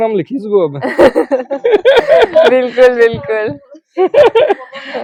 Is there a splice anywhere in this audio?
no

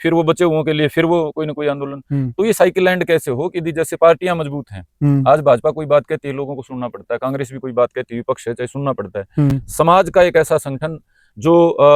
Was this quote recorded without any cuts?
yes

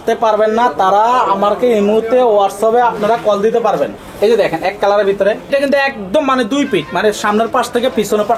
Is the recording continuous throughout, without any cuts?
no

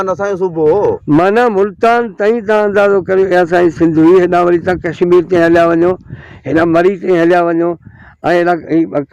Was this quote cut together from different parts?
no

